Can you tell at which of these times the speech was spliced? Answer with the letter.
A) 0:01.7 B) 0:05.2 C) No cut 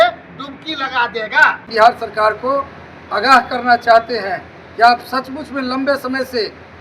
A